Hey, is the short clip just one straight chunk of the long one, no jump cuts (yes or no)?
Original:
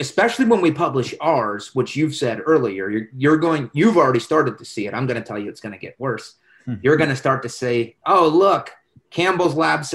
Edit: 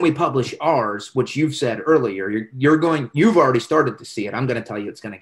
yes